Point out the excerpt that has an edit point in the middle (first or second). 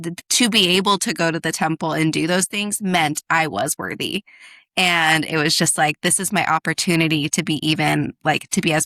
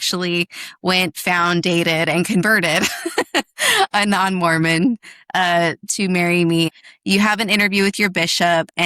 second